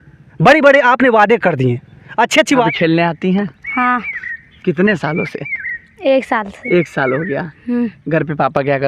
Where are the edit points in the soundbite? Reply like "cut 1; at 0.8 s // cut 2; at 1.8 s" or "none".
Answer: cut 1; at 2.6 s